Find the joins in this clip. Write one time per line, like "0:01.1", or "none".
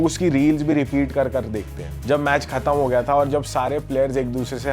0:02.0